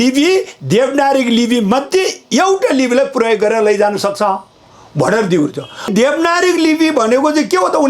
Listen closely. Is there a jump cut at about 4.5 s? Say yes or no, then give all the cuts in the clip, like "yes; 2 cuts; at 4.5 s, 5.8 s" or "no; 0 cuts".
no; 1 cut; at 5.9 s